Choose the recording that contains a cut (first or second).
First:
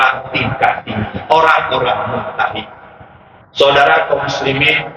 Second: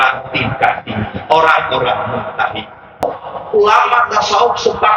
second